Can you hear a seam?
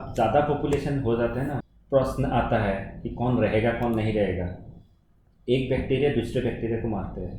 yes; 1 cut; at 1.6 s

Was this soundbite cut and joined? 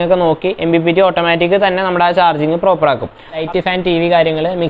yes; 1 cut; at 3.4 s

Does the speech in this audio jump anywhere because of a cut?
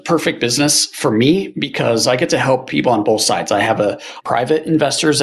no; 0 cuts

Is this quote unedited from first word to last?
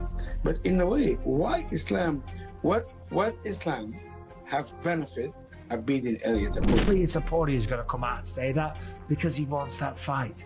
no; 1 cut; at 6.8 s

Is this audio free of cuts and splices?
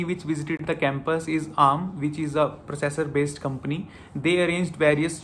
yes; 0 cuts

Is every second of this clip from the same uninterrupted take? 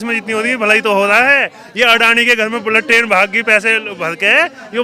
yes; 0 cuts

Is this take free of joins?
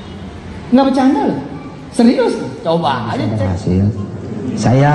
no; 1 cut; at 3.2 s

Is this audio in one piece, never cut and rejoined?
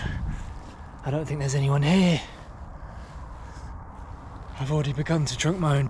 yes; 0 cuts

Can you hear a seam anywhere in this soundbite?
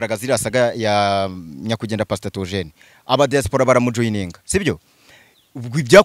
no; 0 cuts

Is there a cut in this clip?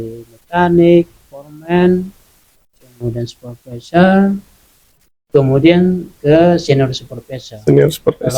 no; 0 cuts

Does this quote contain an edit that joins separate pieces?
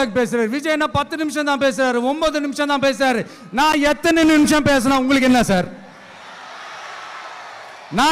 no; 0 cuts

